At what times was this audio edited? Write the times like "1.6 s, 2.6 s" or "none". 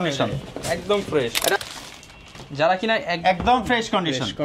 1.6 s